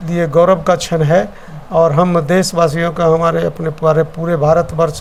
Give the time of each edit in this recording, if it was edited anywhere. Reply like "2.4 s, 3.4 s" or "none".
none